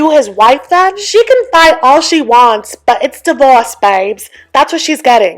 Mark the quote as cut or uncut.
cut